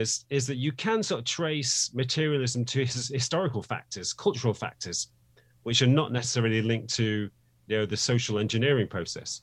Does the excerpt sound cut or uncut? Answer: uncut